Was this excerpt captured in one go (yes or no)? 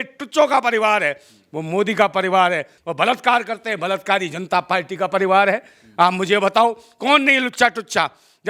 yes